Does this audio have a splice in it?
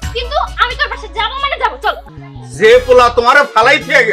yes; 1 cut; at 2.0 s

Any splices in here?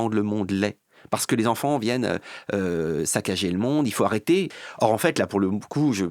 yes; 1 cut; at 4.5 s

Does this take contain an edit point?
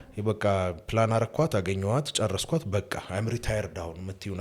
no; 0 cuts

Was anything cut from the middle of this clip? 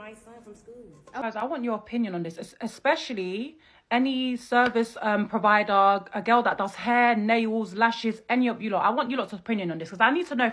yes; 1 cut; at 1.2 s

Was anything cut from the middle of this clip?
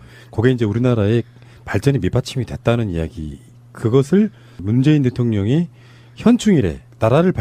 no; 0 cuts

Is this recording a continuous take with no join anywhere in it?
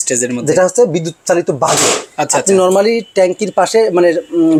yes; 0 cuts

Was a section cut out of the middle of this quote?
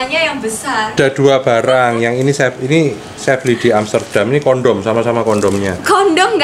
yes; 1 cut; at 0.9 s

